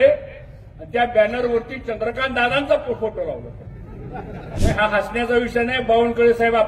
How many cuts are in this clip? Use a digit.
1